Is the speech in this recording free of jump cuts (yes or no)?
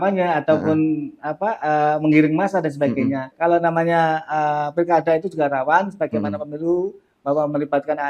no